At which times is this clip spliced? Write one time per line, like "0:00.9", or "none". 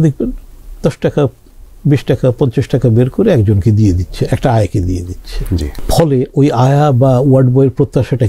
0:05.8